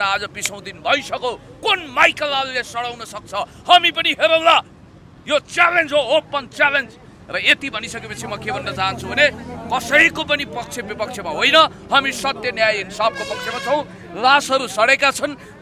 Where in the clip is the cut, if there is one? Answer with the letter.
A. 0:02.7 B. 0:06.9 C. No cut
C